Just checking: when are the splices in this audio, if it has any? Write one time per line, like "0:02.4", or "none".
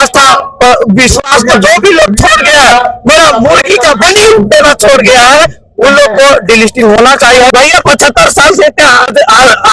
0:07.5